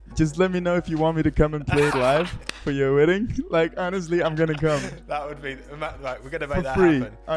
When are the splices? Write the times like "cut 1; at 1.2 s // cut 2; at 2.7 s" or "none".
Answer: none

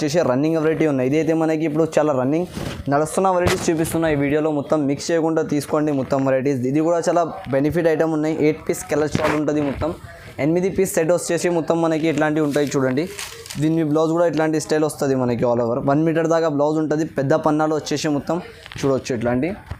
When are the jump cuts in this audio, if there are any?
none

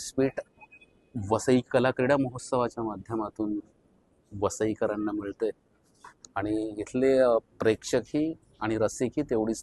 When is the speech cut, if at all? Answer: none

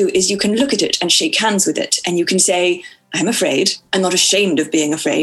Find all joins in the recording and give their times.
cut 1; at 3.8 s

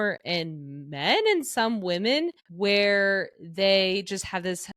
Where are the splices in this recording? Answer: cut 1; at 2.4 s

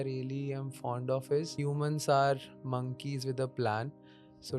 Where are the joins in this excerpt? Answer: cut 1; at 1.5 s

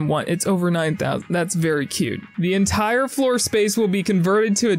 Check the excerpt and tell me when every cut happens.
cut 1; at 2.2 s

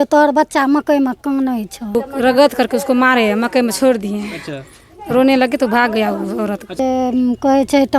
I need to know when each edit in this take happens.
cut 1; at 1.9 s // cut 2; at 6.8 s

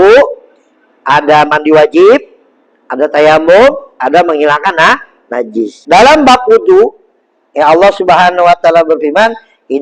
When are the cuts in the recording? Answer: cut 1; at 5.8 s

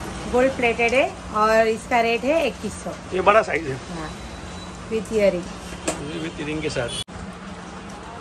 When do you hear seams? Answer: cut 1; at 7.1 s

